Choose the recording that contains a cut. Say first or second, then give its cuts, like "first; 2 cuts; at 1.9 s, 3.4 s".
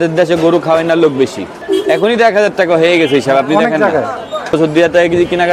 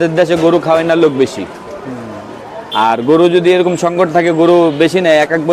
first; 2 cuts; at 1.5 s, 4.5 s